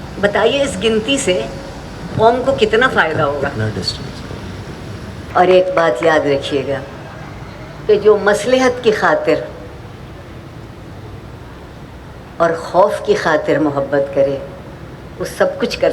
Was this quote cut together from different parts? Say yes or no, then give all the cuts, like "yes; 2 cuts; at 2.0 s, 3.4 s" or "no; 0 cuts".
yes; 1 cut; at 5.3 s